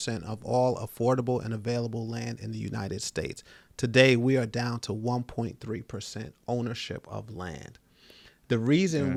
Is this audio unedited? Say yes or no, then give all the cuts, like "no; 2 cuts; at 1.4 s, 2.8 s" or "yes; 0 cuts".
yes; 0 cuts